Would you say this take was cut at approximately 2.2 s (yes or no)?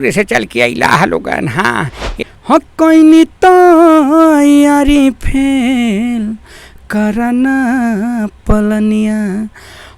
yes